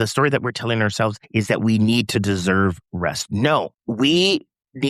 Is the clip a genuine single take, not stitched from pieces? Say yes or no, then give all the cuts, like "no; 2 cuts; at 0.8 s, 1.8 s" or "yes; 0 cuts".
no; 2 cuts; at 1.2 s, 3.8 s